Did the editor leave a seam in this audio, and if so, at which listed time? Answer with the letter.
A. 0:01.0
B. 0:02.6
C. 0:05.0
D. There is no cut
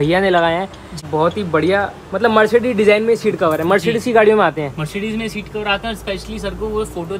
A